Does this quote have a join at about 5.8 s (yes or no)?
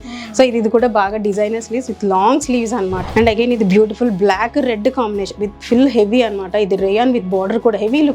no